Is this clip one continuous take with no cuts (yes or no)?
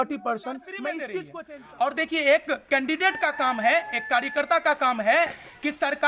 no